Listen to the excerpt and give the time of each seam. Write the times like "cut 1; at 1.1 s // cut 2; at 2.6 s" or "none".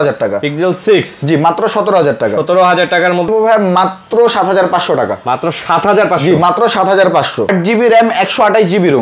cut 1; at 3.3 s // cut 2; at 7.5 s